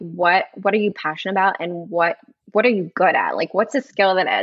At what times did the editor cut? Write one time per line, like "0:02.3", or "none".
0:02.3